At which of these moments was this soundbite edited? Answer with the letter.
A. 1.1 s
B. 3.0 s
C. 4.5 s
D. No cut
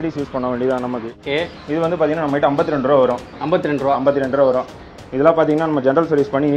A